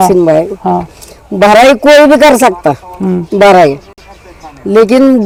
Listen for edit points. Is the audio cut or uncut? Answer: uncut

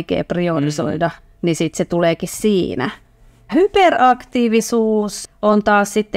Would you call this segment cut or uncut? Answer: cut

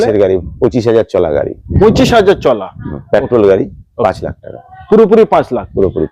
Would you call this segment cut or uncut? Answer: uncut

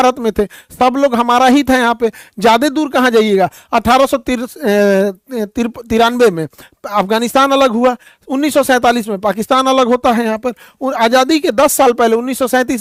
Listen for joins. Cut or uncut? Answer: uncut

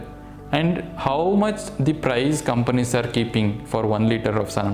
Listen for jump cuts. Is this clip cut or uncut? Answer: uncut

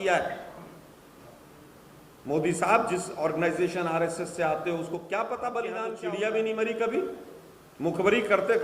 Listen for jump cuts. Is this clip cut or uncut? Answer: cut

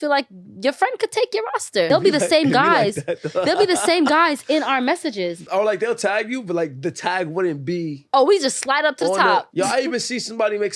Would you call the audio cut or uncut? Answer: cut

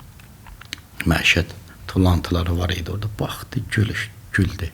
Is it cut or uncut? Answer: uncut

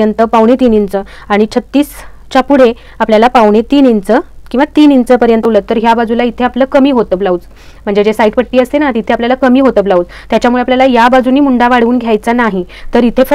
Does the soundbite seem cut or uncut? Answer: cut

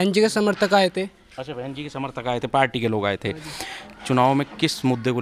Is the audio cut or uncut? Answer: cut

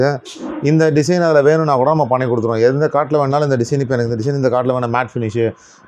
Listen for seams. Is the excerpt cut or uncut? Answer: uncut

